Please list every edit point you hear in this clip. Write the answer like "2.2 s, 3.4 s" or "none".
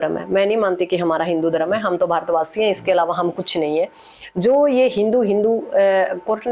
none